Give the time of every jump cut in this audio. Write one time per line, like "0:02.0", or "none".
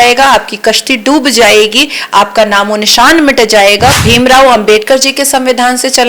0:04.0

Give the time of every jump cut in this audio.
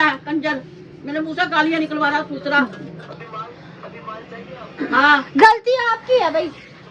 none

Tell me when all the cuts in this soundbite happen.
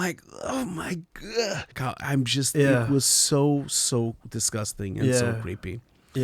0:01.8

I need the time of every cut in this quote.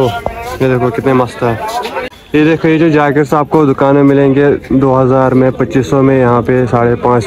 0:02.0

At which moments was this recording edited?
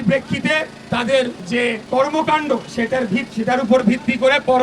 0:01.6
0:03.3

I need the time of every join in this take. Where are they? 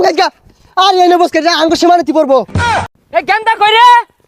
0:02.8

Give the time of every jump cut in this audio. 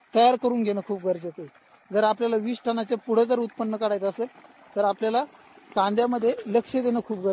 none

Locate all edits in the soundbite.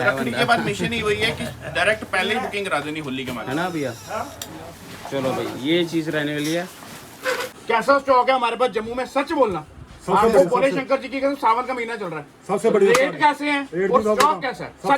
0:07.5

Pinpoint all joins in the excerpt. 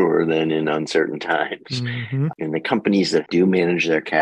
0:02.3
0:03.3

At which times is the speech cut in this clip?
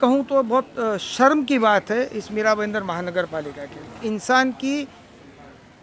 0:04.0

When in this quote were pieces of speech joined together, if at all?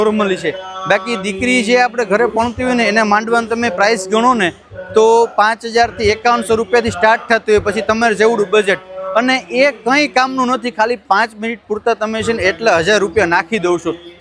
none

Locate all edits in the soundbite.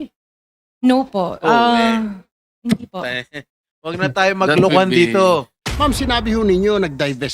0:05.6

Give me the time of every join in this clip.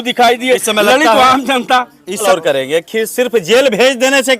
0:02.2

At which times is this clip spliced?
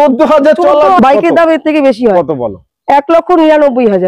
0:01.0

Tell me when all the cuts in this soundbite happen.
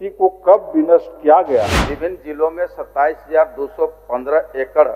0:01.8

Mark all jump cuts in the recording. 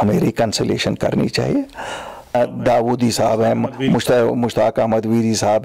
0:02.3

